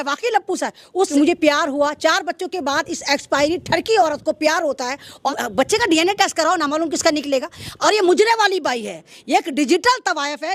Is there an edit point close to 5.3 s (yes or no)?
yes